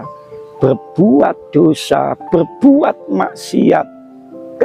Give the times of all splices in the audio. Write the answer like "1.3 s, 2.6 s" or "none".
none